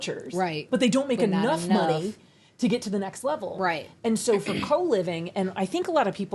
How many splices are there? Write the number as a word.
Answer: zero